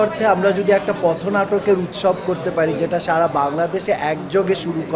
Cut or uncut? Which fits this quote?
uncut